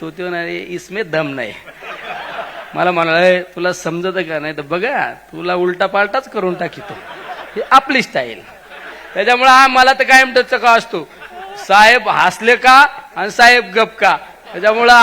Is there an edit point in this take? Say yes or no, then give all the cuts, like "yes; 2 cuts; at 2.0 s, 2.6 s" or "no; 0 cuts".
yes; 1 cut; at 9.0 s